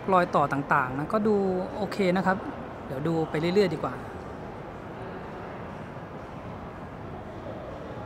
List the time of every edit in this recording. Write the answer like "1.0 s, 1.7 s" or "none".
none